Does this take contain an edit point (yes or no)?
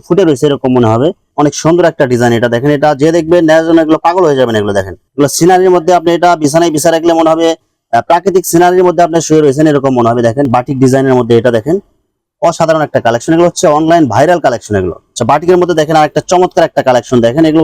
yes